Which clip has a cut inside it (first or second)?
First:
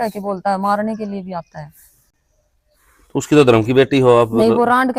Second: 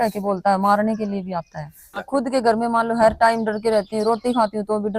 second